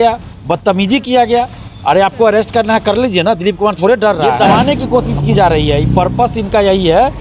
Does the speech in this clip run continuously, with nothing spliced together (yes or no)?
no